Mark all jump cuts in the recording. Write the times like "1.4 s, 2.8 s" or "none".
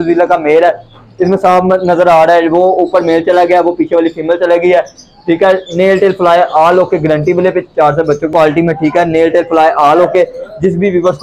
8.3 s